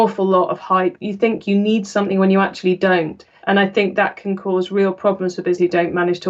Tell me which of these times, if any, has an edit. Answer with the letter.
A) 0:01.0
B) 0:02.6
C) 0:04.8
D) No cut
A